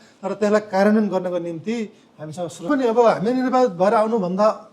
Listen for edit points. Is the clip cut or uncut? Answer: cut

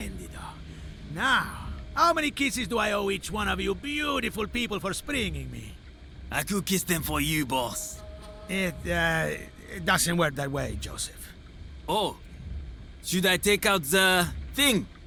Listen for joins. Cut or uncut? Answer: uncut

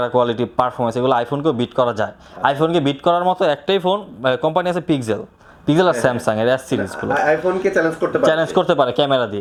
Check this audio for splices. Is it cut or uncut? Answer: uncut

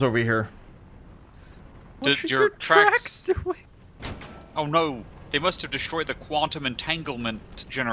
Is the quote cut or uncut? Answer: cut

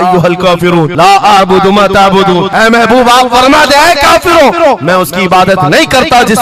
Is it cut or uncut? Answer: uncut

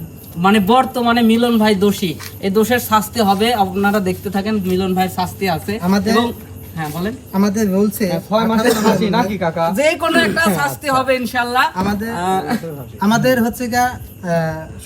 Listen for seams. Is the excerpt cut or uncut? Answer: uncut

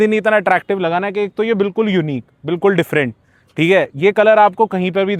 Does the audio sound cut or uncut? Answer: uncut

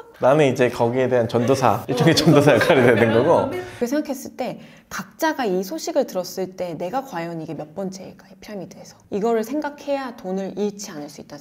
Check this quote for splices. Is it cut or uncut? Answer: cut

